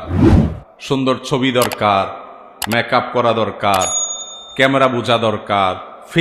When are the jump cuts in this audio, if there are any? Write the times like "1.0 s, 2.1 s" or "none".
none